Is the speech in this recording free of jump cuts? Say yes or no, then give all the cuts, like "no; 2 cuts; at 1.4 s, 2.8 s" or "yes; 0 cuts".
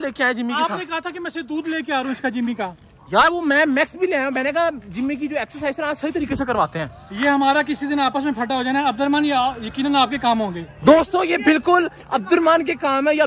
yes; 0 cuts